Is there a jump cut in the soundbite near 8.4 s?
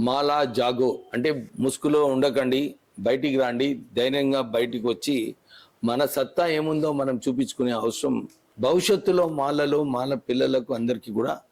yes; 2 cuts; at 1.5 s, 8.4 s

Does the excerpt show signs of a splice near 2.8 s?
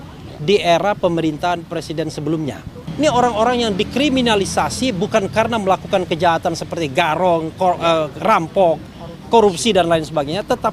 yes; 1 cut; at 2.8 s

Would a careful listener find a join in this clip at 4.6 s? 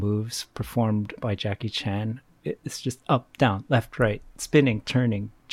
no; 1 cut; at 1.2 s

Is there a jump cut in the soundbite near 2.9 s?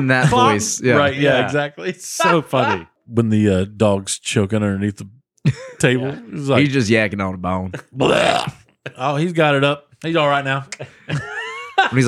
yes; 1 cut; at 2.9 s

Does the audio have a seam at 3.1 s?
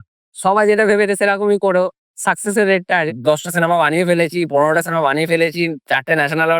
yes; 1 cut; at 3.1 s

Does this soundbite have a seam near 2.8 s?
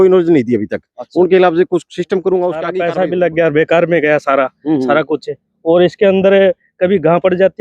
yes; 1 cut; at 2.8 s

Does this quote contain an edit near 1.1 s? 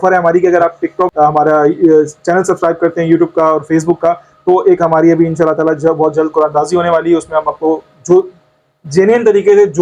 yes; 1 cut; at 1.1 s

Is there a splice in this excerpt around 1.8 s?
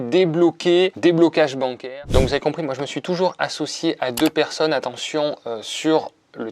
yes; 1 cut; at 1.8 s

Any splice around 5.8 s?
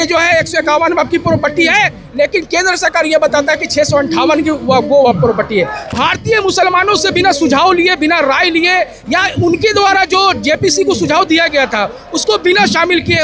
yes; 1 cut; at 5.8 s

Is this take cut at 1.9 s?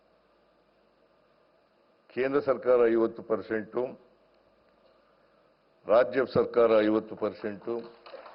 no; 0 cuts

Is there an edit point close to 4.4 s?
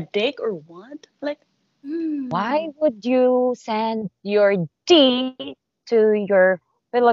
no; 1 cut; at 1.9 s

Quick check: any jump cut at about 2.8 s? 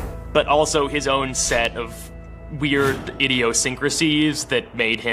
no; 0 cuts

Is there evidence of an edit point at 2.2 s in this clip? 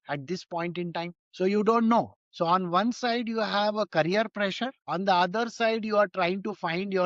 yes; 1 cut; at 2.2 s

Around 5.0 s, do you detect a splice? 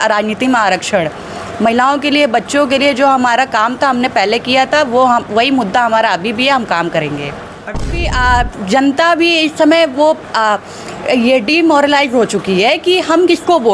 no; 1 cut; at 7.8 s

